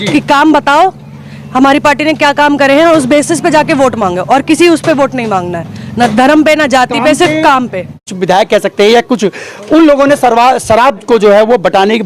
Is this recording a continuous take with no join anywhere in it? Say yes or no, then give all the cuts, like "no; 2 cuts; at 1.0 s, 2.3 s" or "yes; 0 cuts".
no; 1 cut; at 8.1 s